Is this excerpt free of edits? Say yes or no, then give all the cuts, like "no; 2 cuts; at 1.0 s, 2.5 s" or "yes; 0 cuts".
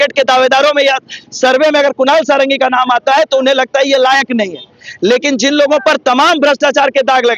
yes; 0 cuts